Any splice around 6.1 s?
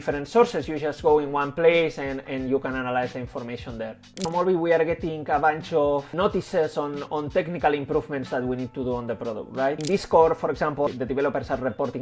yes; 4 cuts; at 4.2 s, 6.1 s, 9.8 s, 10.9 s

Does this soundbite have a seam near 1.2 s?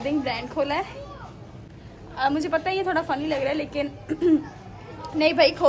no; 0 cuts

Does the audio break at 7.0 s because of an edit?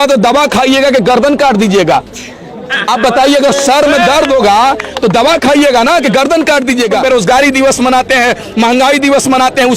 yes; 1 cut; at 7.0 s

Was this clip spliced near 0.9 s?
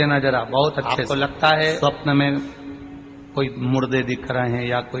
yes; 2 cuts; at 0.9 s, 1.8 s

